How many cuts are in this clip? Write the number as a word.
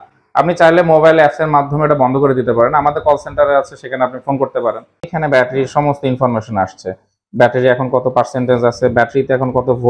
one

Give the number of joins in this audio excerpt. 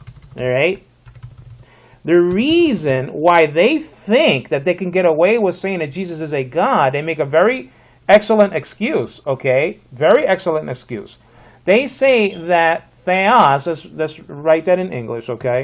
zero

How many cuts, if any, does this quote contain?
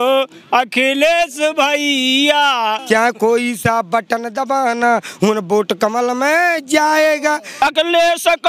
two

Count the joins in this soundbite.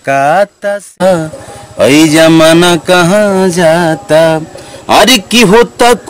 one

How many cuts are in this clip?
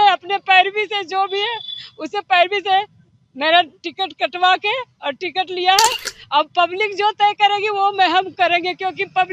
zero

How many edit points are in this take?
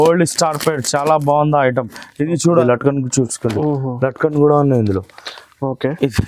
one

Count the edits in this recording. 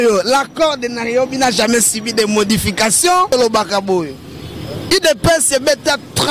one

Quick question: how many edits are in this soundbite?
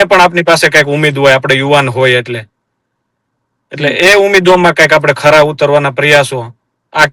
zero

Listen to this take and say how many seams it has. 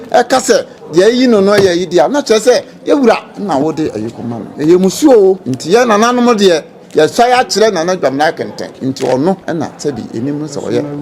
four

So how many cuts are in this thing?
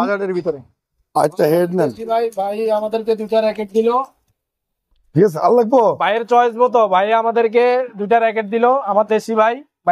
zero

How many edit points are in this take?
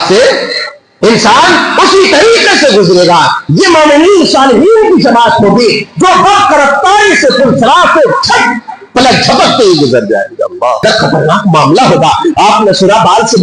one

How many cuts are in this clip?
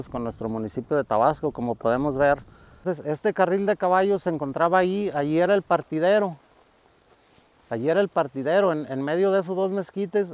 one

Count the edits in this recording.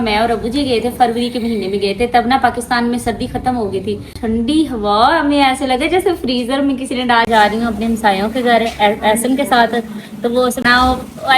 three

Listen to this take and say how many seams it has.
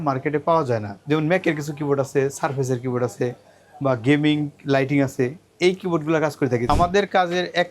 one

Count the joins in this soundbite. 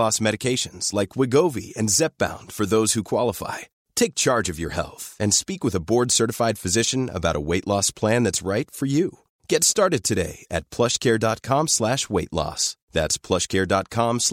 zero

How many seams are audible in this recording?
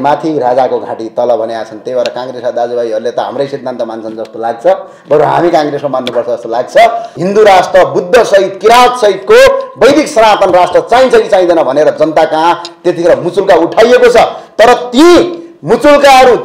one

